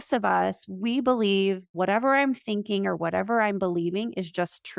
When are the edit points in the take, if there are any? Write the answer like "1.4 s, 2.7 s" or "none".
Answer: 1.7 s